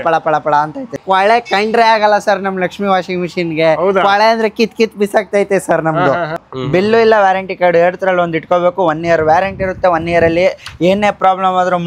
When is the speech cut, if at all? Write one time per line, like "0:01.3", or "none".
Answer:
0:01.0
0:06.5

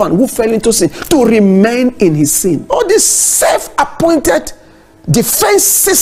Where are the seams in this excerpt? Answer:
0:02.6

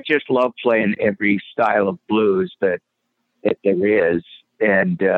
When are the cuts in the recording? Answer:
none

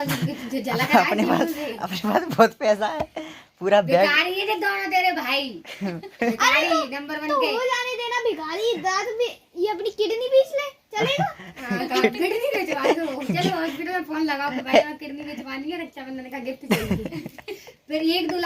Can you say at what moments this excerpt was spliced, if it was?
none

